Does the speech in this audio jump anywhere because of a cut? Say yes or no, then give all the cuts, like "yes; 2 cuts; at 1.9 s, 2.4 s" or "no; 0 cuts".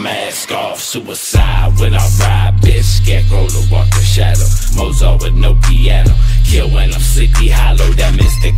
no; 0 cuts